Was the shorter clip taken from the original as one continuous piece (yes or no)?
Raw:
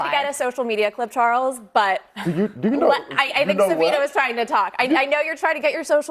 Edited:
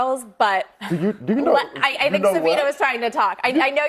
yes